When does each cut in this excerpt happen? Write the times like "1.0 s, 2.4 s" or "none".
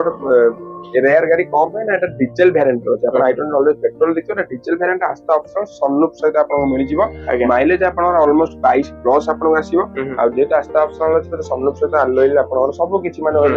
none